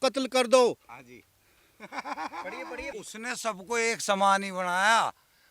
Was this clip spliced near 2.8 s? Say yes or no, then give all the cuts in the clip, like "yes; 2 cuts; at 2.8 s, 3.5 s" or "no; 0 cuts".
yes; 1 cut; at 2.8 s